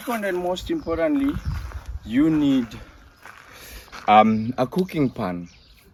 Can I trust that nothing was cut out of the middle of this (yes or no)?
yes